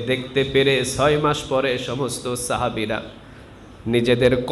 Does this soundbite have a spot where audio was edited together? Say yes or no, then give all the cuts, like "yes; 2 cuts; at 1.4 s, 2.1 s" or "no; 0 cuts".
no; 0 cuts